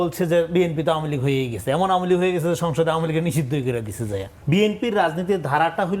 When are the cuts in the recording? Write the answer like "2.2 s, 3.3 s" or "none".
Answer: 4.3 s

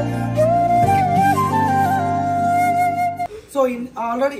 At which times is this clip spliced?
none

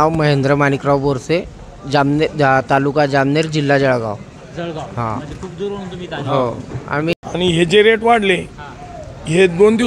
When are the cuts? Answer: 7.1 s

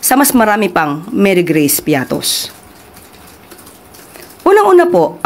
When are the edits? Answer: none

